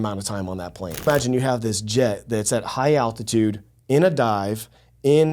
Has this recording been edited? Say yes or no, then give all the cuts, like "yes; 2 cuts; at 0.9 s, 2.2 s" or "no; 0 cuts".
yes; 1 cut; at 1.1 s